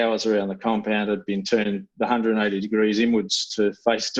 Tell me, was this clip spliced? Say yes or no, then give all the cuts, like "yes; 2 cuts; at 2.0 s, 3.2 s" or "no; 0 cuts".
no; 0 cuts